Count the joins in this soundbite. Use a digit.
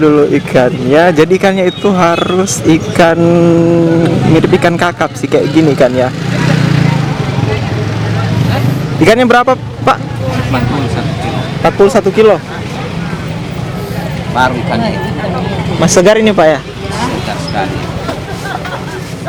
0